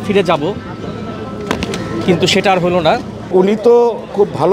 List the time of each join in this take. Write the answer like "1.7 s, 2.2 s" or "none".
3.3 s